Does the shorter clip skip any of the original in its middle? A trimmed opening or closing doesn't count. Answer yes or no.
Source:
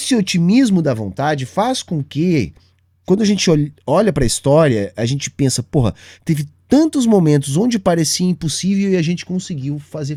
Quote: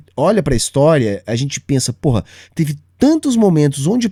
no